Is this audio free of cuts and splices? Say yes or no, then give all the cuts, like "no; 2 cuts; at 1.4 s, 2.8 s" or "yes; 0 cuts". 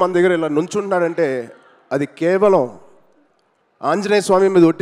yes; 0 cuts